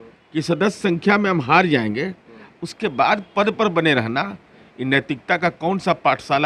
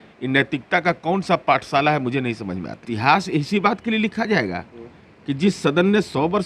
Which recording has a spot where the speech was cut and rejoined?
second; 1 cut; at 2.9 s

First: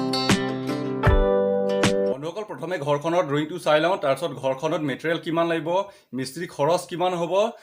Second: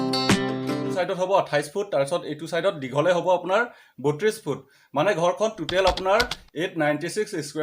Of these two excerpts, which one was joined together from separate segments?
second; 1 cut; at 0.9 s

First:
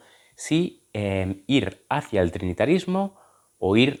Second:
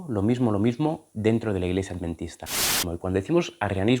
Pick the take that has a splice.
second; 1 cut; at 2.9 s

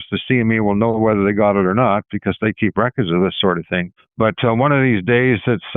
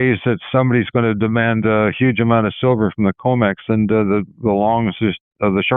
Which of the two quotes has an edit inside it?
first; 1 cut; at 4.0 s

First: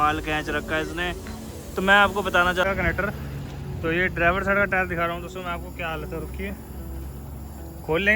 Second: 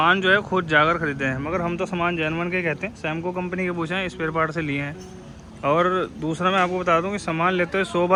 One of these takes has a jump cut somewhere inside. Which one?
first; 1 cut; at 2.6 s

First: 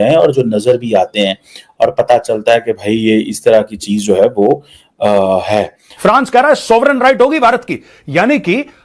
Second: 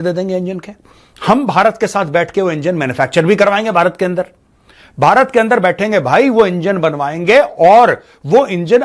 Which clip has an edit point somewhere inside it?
first; 1 cut; at 5.8 s

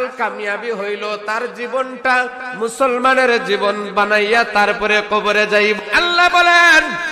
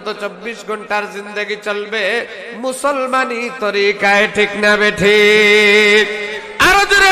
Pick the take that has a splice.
first; 1 cut; at 5.8 s

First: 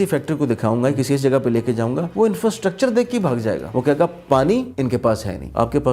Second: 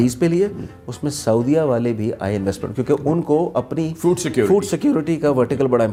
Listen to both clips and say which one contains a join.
first; 3 cuts; at 2.1 s, 3.6 s, 5.1 s

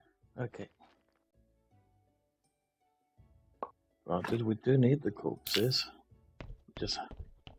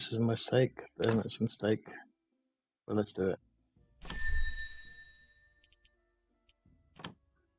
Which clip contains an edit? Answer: first; 1 cut; at 1.0 s

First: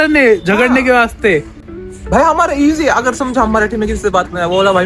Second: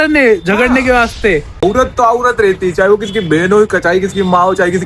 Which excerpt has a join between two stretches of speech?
second; 1 cut; at 1.6 s

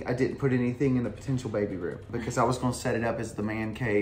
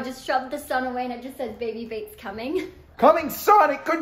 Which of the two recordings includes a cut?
second; 1 cut; at 2.8 s

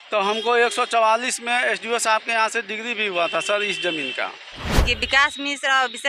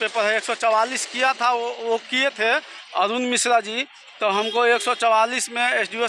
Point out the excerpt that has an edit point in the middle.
first; 1 cut; at 4.8 s

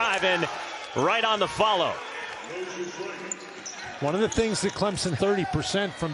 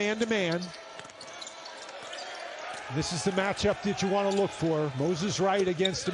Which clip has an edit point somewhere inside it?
first; 1 cut; at 5.2 s

